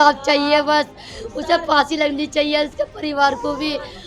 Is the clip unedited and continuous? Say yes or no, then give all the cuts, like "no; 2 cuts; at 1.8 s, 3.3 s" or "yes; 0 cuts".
yes; 0 cuts